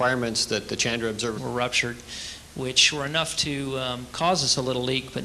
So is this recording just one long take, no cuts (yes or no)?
yes